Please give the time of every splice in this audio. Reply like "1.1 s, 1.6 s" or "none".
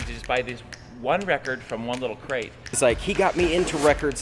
2.8 s